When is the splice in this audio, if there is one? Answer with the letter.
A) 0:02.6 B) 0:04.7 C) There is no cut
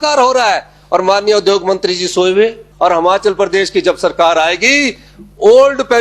A